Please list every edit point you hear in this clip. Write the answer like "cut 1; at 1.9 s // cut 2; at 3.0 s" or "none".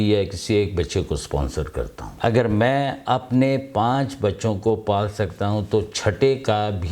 cut 1; at 2.0 s